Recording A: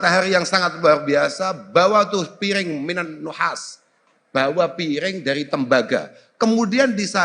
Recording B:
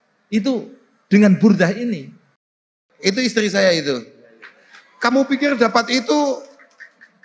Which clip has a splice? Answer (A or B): B